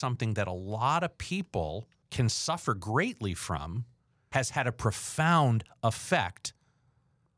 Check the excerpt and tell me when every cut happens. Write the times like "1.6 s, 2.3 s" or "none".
2.0 s, 4.3 s